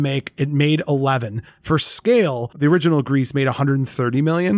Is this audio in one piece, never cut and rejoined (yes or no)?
yes